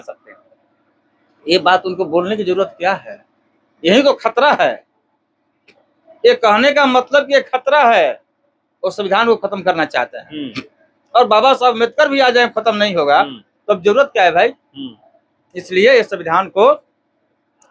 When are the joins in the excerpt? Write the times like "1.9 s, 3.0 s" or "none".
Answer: none